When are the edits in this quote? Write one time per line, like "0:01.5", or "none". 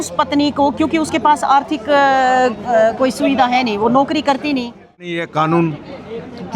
0:05.1